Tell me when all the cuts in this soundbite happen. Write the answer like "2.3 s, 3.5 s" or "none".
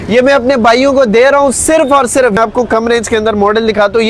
2.4 s